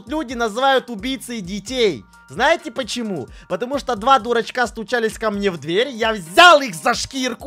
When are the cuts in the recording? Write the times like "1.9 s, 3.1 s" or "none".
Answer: none